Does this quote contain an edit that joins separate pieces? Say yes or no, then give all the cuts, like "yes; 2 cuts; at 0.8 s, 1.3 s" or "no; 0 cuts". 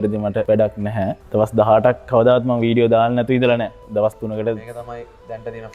yes; 1 cut; at 1.2 s